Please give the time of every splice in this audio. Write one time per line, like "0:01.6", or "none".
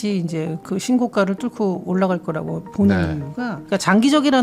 none

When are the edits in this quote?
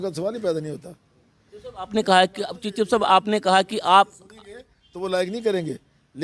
none

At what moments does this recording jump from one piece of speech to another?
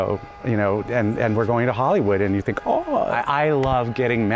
0:03.1

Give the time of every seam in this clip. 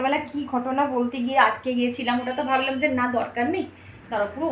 none

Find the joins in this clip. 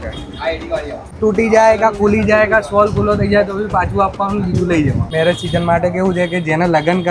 0:01.1
0:05.1

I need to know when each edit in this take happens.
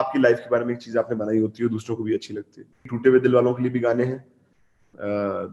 0:02.9

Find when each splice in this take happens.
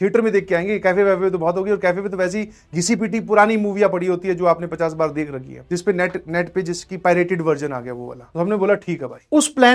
none

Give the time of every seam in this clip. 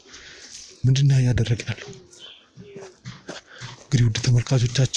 none

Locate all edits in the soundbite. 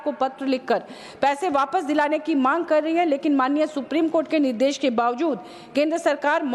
none

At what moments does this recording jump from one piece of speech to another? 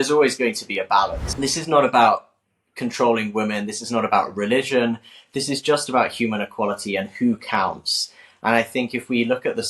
0:01.2

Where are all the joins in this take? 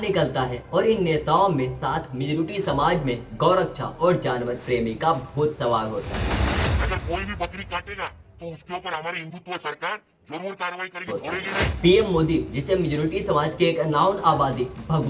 0:11.5

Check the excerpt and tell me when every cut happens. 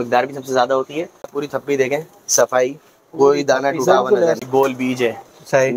0:01.4
0:04.4

